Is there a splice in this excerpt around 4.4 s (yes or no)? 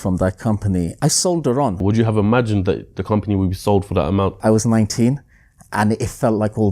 yes